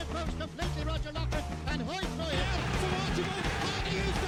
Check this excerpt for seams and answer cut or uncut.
uncut